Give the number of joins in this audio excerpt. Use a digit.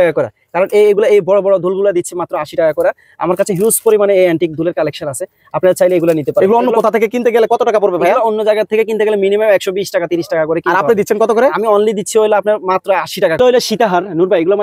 1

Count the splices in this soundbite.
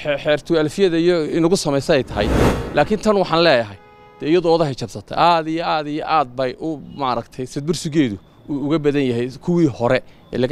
1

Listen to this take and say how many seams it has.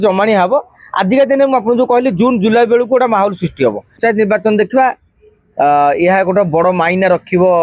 1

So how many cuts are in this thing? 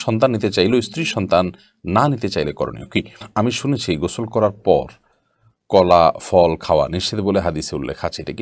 1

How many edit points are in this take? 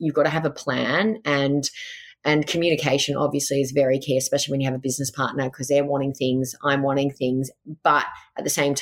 0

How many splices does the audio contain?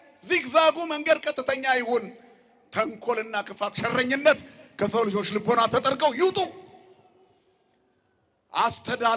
0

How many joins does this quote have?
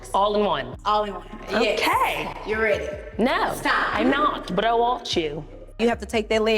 1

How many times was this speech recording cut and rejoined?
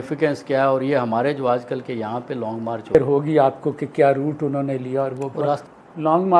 2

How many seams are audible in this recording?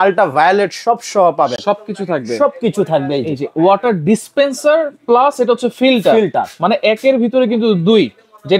0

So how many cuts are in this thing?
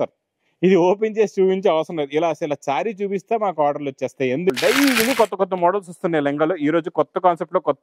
1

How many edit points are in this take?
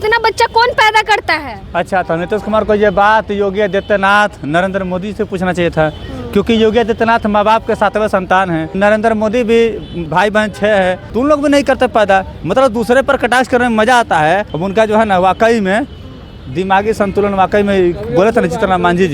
4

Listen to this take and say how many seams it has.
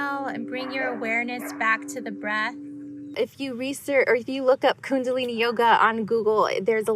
1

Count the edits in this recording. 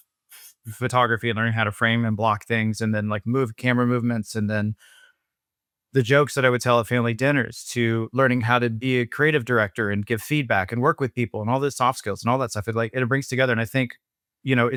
0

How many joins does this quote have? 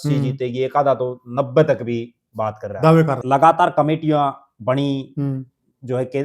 1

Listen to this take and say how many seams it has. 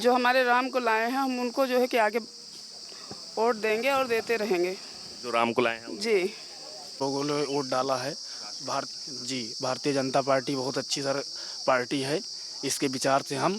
1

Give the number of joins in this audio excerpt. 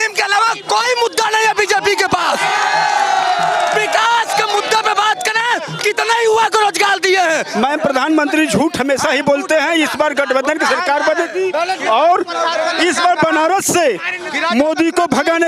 1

